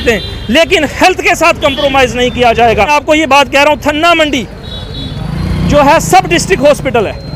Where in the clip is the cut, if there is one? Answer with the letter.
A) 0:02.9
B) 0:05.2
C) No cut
A